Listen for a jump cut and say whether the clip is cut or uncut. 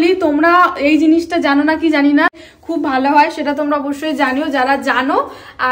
cut